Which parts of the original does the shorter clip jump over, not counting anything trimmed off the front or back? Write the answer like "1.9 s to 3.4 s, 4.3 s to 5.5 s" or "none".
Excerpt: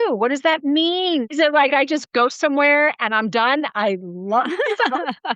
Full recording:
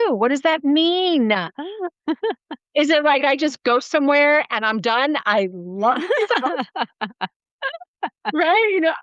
1.3 s to 2.8 s